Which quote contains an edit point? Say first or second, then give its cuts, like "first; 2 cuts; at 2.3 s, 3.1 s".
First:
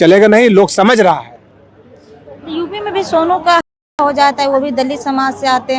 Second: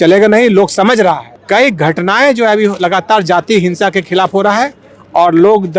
second; 1 cut; at 1.3 s